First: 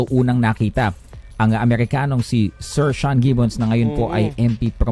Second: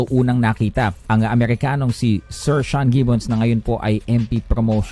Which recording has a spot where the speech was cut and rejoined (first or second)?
second